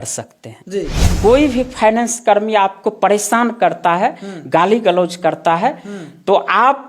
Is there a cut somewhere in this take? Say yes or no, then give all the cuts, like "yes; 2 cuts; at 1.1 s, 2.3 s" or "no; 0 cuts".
yes; 1 cut; at 1.0 s